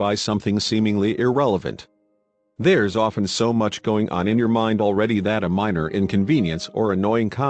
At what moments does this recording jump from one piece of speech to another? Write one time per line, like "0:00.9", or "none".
0:05.0